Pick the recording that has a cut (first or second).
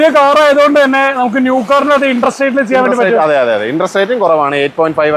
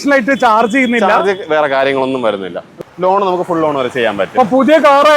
second